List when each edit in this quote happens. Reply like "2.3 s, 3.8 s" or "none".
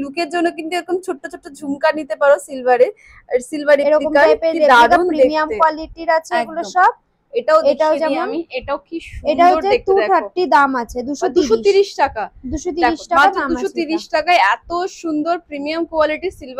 none